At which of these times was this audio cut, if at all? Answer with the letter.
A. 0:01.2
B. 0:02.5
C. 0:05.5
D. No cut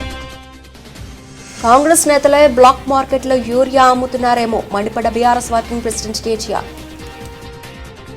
A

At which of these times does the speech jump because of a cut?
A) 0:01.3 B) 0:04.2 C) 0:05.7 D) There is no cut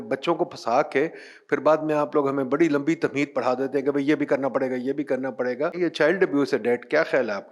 C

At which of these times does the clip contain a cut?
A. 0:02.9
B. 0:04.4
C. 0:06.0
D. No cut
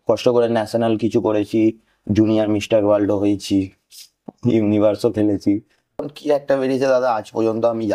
C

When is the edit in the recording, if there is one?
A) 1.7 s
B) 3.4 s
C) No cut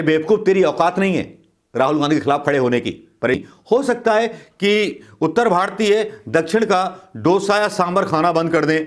B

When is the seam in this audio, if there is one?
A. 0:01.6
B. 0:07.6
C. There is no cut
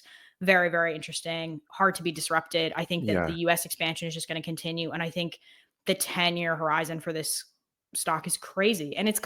A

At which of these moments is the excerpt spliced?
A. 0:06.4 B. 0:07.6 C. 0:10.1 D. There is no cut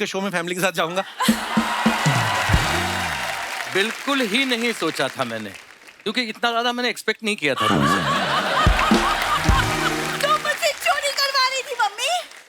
C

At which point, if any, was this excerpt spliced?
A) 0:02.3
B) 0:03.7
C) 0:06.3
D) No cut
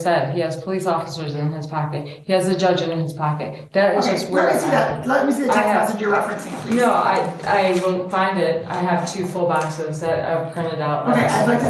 D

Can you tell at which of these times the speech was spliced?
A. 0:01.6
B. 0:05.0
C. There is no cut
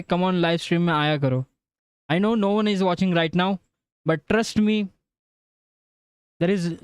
C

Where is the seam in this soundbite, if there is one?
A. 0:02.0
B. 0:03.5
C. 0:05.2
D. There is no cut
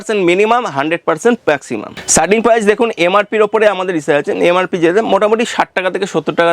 A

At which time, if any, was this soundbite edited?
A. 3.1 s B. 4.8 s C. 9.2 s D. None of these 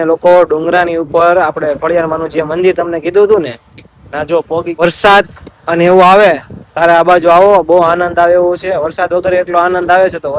B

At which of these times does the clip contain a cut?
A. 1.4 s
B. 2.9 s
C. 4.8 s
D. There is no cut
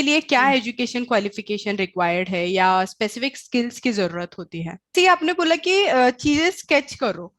C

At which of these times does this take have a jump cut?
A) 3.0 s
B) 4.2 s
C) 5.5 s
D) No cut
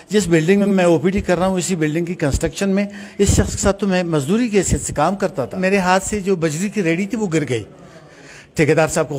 C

